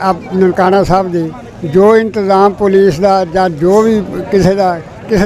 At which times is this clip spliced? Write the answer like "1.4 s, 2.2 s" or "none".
none